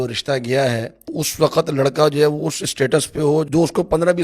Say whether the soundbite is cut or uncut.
cut